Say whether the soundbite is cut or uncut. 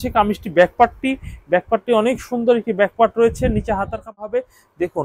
cut